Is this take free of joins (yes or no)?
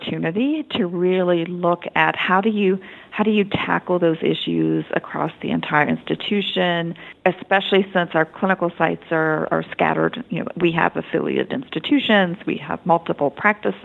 no